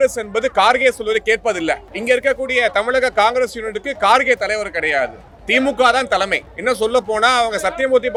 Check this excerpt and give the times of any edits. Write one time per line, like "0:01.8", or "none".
none